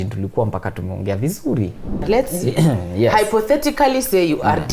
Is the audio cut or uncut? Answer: cut